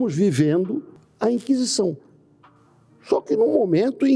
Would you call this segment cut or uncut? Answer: cut